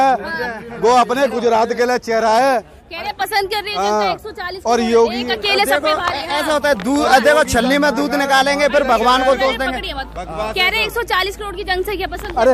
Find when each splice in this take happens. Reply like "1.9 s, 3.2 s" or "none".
none